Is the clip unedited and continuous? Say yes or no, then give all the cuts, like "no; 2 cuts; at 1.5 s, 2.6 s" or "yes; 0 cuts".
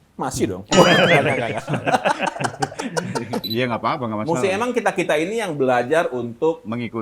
no; 1 cut; at 3.4 s